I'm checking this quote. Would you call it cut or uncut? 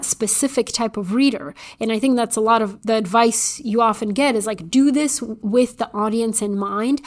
cut